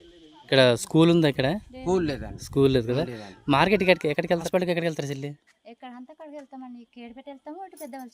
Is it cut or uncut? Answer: cut